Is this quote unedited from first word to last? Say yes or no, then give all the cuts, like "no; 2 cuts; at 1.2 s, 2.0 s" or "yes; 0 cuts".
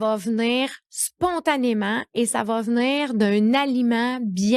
yes; 0 cuts